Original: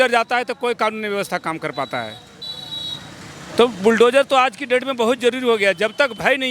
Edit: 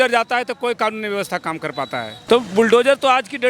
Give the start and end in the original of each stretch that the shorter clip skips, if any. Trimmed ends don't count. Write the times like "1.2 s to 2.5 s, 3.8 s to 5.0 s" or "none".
2.2 s to 3.4 s